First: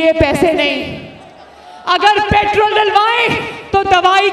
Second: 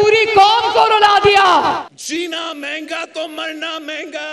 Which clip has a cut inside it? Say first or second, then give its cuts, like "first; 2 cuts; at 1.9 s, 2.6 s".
second; 1 cut; at 1.9 s